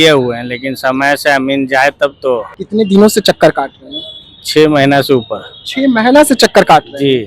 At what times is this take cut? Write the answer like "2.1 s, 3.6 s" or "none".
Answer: 2.6 s